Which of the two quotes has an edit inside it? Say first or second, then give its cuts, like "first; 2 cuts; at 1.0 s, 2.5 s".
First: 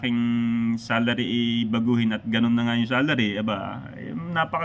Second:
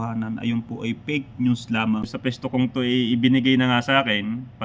second; 1 cut; at 2.1 s